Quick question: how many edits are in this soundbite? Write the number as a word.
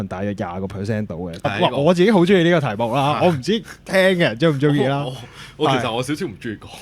one